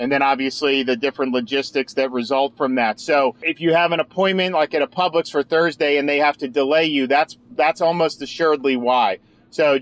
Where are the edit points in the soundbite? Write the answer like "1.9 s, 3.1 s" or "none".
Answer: 3.5 s